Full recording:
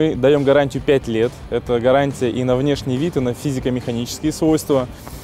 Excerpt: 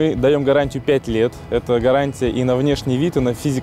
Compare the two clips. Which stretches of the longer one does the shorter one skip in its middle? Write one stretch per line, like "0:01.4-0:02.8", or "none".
none